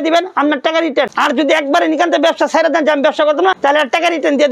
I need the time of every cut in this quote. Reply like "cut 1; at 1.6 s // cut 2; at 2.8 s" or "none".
cut 1; at 1.1 s // cut 2; at 3.6 s